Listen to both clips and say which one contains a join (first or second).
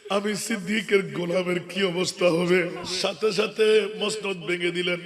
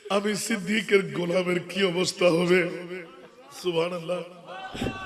first